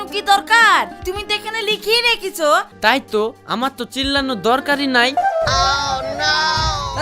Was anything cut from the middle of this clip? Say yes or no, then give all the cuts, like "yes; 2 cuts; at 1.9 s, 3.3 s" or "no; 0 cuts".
yes; 2 cuts; at 2.7 s, 5.2 s